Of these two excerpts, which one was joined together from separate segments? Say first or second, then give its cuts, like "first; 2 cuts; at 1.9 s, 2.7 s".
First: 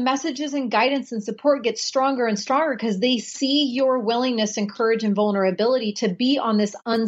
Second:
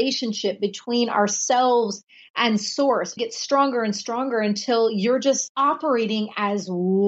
second; 2 cuts; at 3.1 s, 5.4 s